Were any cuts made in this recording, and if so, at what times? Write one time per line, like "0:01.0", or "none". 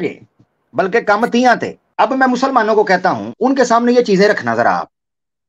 0:01.8
0:03.3